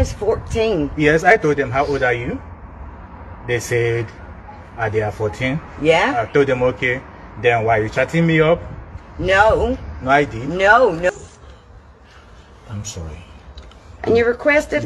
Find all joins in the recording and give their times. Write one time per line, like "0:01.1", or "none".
0:11.1